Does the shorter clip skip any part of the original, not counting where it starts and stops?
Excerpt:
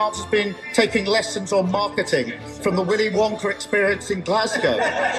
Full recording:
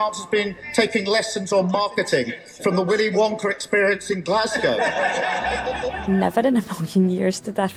no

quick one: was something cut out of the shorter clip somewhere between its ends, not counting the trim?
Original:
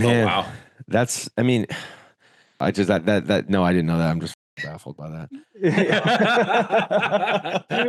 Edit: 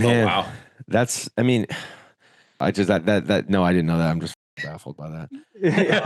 no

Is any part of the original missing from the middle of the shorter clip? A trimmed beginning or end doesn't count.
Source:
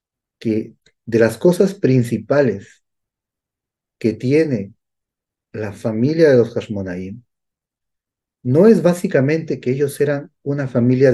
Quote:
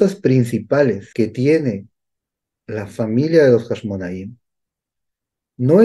yes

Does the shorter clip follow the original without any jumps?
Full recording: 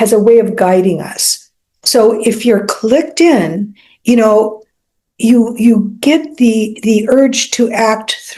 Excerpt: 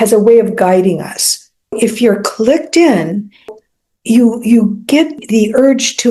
no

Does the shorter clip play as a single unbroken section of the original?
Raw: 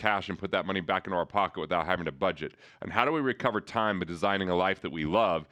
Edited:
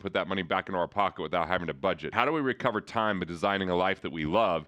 no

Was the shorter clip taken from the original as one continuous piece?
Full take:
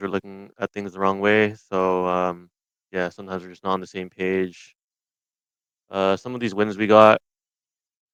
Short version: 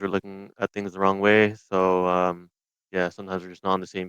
yes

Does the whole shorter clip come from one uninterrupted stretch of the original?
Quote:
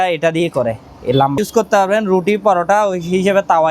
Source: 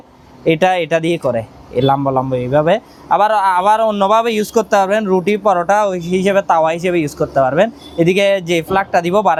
no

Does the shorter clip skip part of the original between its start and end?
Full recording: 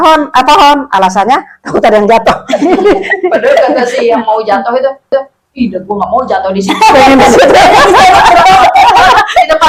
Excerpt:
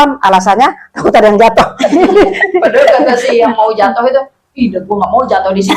yes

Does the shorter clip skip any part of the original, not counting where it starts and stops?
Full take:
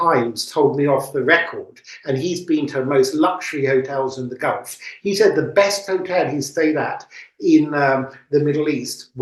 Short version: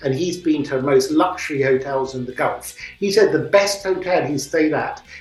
no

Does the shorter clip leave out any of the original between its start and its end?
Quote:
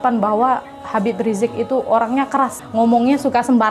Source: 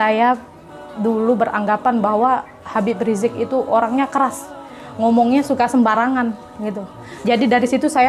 yes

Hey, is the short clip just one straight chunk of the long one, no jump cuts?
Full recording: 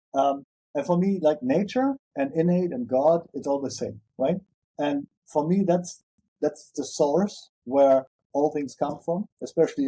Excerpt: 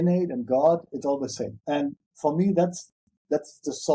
no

